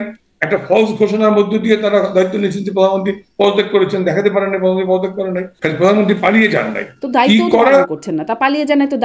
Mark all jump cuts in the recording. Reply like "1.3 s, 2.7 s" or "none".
5.5 s